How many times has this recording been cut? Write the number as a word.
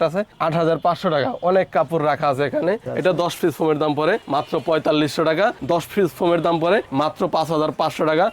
two